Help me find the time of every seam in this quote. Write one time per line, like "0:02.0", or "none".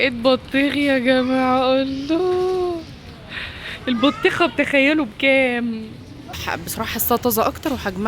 0:06.4